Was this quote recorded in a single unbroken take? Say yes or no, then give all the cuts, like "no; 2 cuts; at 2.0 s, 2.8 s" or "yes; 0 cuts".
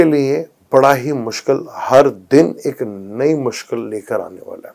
yes; 0 cuts